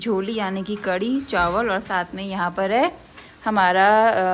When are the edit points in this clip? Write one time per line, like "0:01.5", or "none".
none